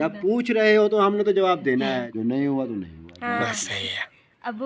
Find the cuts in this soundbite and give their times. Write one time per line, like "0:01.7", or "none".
0:02.1